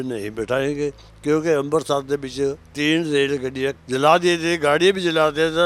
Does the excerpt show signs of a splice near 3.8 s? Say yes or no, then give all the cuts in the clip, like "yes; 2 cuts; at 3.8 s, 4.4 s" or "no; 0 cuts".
yes; 2 cuts; at 2.7 s, 3.8 s